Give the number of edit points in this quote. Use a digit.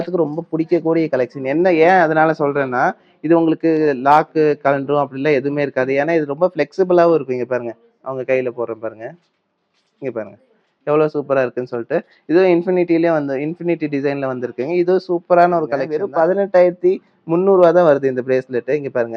1